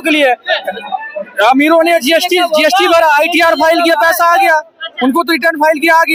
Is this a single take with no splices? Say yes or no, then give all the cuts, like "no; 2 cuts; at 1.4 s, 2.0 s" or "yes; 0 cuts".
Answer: yes; 0 cuts